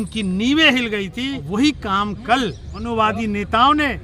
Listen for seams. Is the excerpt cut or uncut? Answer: cut